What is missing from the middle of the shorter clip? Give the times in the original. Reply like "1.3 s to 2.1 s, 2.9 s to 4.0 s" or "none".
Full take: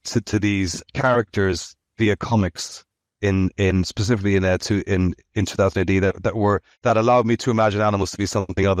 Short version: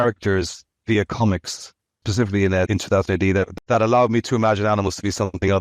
3.1 s to 3.9 s, 4.6 s to 5.3 s, 6.2 s to 6.7 s